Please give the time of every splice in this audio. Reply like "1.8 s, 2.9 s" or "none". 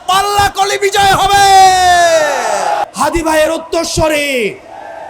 2.9 s